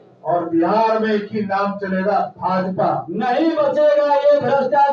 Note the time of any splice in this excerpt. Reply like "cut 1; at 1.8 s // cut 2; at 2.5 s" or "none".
cut 1; at 3.1 s